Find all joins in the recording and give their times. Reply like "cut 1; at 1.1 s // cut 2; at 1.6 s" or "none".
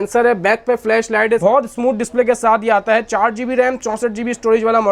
none